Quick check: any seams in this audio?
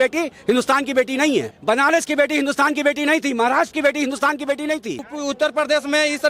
yes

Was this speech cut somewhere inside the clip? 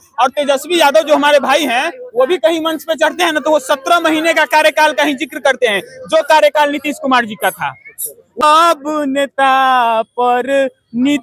yes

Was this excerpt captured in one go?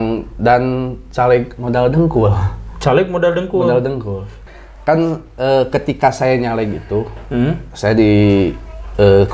no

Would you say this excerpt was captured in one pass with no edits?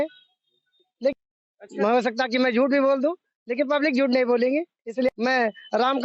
no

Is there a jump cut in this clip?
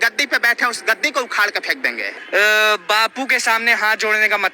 no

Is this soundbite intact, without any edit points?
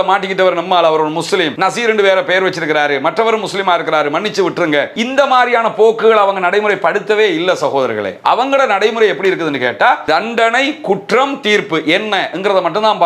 yes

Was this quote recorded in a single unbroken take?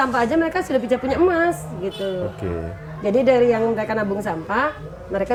yes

